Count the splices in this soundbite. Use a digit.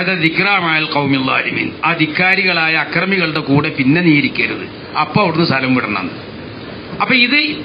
0